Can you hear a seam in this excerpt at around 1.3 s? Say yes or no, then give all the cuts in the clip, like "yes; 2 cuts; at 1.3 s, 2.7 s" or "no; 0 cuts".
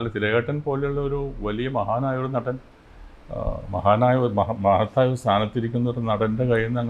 no; 0 cuts